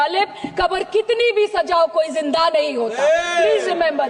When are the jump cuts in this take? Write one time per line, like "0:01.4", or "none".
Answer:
none